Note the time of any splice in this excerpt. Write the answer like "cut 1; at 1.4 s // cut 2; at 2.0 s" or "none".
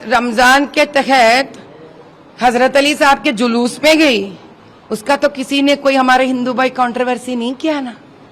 none